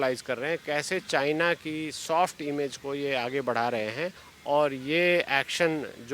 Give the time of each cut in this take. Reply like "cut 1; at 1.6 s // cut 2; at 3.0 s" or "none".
cut 1; at 4.3 s